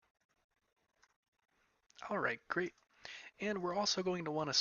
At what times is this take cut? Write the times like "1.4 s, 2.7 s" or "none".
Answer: 1.0 s